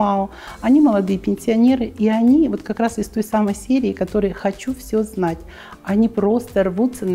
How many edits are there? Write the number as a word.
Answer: zero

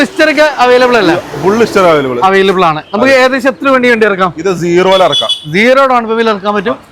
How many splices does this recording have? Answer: zero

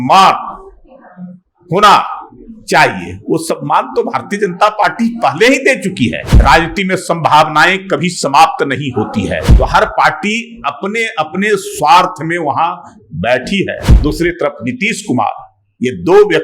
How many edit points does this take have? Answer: three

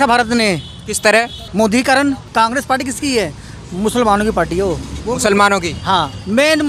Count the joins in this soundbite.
three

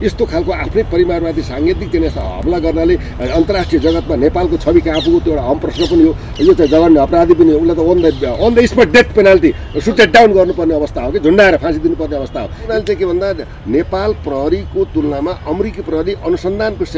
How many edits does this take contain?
one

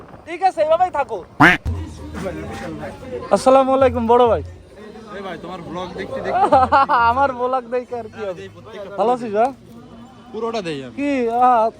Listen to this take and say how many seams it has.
one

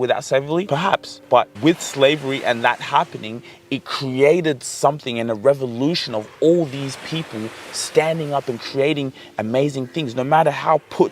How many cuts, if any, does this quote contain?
one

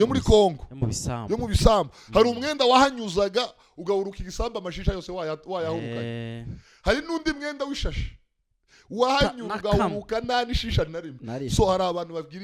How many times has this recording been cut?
zero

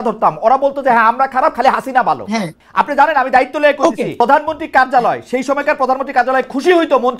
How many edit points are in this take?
two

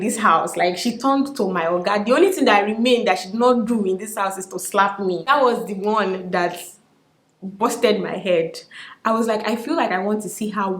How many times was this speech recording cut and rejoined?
one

